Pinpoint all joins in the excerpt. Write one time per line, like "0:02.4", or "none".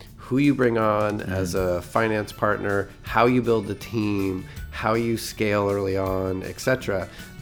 none

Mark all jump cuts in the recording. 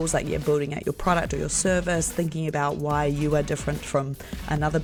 none

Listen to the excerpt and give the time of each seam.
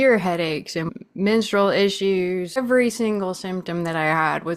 0:00.9
0:02.6

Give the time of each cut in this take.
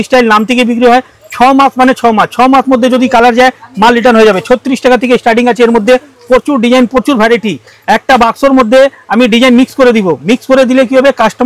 none

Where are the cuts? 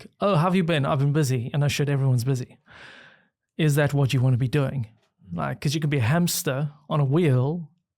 none

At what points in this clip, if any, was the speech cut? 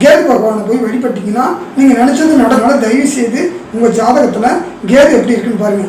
0:02.6

